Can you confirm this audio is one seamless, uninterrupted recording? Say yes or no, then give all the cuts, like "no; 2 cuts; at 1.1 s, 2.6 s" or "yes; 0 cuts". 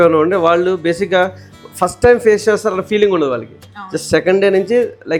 yes; 0 cuts